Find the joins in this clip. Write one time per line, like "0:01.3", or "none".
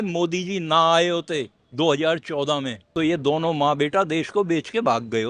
0:01.6
0:02.8